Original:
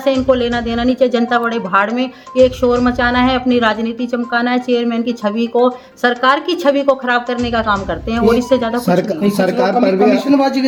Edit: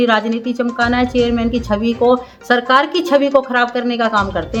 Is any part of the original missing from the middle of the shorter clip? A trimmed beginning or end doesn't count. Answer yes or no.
no